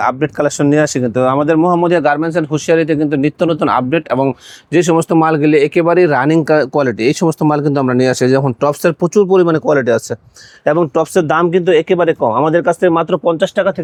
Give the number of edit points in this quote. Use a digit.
0